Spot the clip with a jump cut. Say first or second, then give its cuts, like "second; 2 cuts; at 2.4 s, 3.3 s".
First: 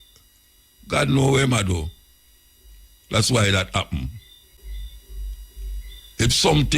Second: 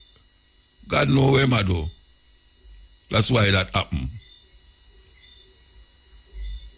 first; 1 cut; at 4.5 s